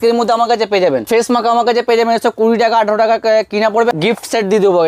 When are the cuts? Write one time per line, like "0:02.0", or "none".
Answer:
0:01.1
0:03.9